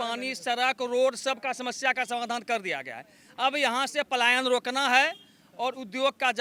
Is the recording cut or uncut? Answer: uncut